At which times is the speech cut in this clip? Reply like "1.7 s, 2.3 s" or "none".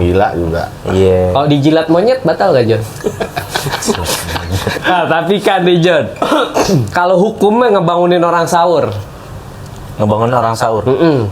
4.8 s